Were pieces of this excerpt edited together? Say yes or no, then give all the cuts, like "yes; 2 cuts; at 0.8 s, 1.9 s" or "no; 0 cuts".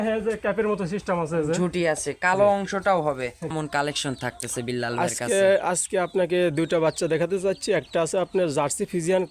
yes; 1 cut; at 3.5 s